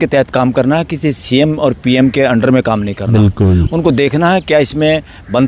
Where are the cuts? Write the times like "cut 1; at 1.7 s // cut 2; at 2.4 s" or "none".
none